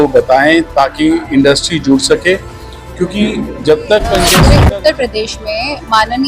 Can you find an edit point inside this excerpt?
yes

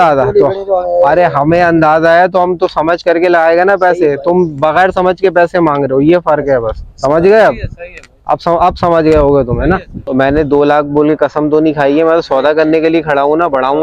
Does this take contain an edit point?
yes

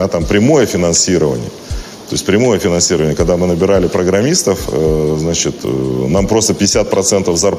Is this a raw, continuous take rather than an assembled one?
yes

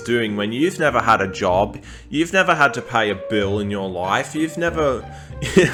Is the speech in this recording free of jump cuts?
yes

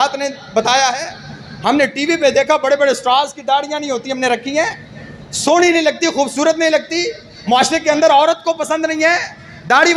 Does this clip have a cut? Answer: no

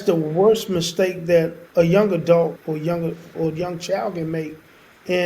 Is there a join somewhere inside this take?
yes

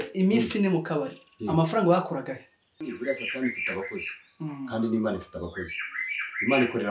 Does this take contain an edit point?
yes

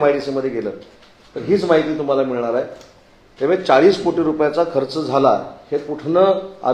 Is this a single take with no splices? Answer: yes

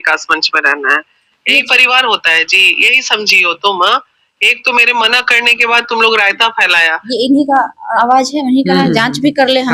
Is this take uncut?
yes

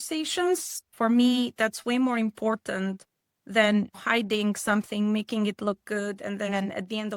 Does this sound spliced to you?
yes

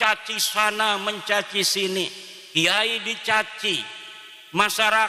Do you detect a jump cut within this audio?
no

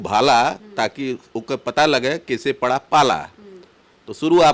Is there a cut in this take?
no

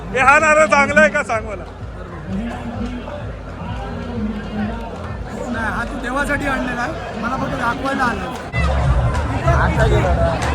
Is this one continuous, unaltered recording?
no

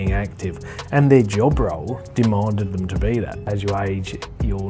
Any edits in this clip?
yes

